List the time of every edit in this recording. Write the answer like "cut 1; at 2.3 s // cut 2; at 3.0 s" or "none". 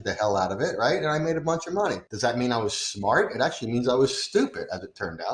cut 1; at 2.1 s